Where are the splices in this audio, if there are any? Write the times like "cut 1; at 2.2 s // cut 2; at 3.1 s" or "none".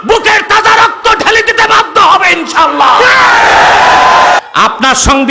cut 1; at 4.4 s